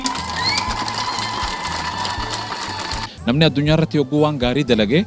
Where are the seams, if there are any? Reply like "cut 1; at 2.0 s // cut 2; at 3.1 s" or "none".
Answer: cut 1; at 3.0 s